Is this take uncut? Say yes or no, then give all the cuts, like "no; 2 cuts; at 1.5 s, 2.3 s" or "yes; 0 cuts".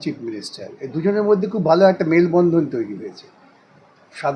yes; 0 cuts